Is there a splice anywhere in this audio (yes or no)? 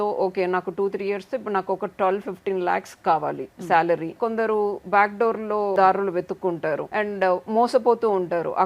yes